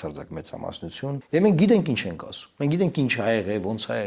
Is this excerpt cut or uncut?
cut